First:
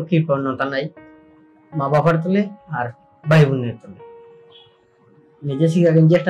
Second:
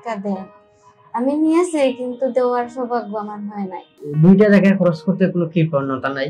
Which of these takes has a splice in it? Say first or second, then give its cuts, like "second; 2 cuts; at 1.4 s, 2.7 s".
second; 1 cut; at 4.0 s